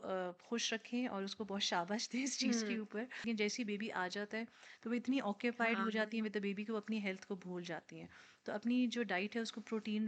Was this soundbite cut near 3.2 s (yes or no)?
yes